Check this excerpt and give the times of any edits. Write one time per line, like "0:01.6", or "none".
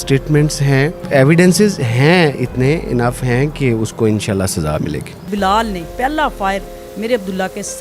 0:01.0
0:05.2